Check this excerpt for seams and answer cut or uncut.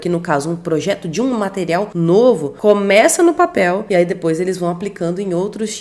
cut